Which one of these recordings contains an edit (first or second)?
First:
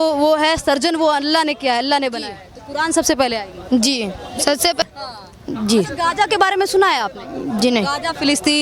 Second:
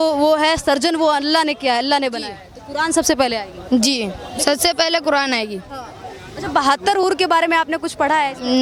first